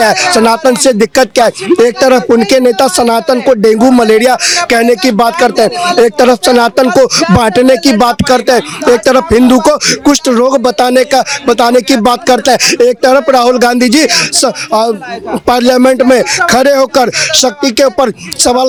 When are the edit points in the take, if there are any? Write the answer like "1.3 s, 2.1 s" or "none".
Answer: none